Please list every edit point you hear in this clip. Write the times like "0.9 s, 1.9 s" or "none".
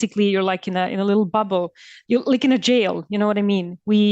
1.9 s